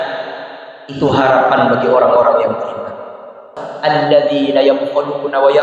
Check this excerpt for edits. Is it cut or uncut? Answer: cut